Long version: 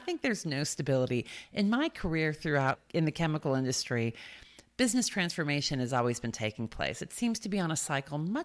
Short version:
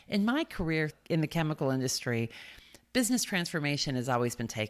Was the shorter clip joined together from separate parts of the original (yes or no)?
yes